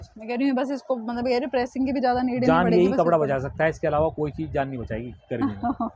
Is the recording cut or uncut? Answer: uncut